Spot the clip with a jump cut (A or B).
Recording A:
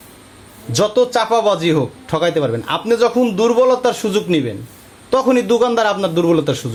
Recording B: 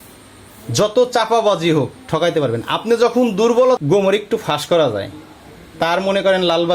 B